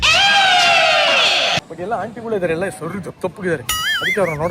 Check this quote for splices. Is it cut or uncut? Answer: uncut